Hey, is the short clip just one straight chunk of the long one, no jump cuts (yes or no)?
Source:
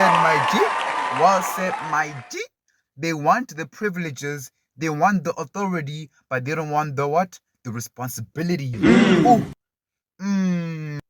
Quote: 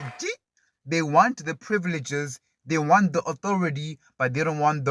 yes